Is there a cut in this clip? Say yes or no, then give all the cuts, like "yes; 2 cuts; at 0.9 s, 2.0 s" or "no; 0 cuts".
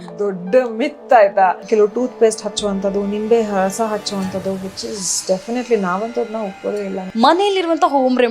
yes; 2 cuts; at 1.6 s, 7.0 s